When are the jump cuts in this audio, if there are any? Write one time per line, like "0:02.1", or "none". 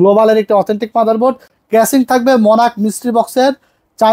0:01.5